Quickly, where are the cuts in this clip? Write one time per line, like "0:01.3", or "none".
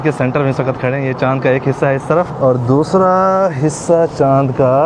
0:02.3